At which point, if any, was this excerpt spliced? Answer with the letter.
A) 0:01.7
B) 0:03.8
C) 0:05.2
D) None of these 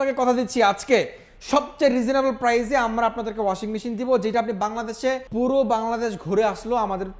C